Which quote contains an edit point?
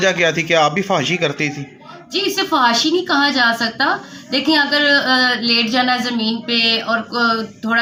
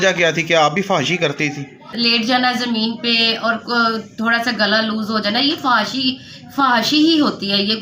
second; 1 cut; at 1.9 s

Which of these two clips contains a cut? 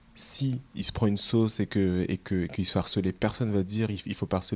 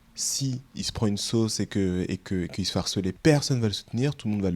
second; 1 cut; at 3.2 s

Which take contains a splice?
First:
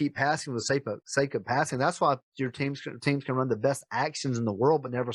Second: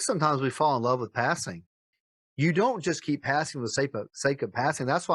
second; 1 cut; at 1.9 s

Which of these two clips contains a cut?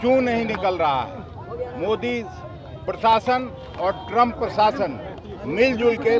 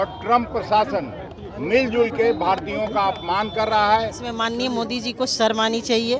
second; 1 cut; at 4.2 s

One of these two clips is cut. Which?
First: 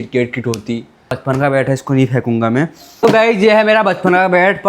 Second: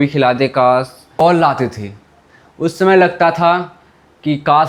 first; 1 cut; at 1.2 s

